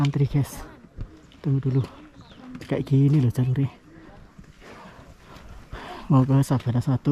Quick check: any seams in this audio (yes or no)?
no